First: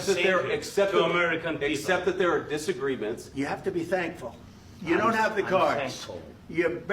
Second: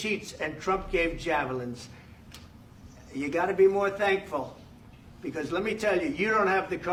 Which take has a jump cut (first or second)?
first